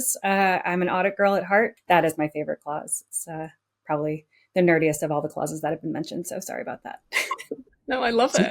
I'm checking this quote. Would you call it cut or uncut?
cut